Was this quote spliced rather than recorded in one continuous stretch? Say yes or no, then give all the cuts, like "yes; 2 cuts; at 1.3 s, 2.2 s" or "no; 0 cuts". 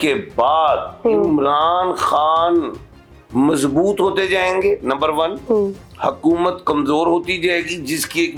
no; 0 cuts